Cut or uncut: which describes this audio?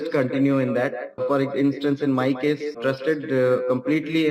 cut